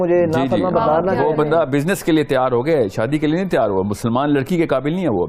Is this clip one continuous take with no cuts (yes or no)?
yes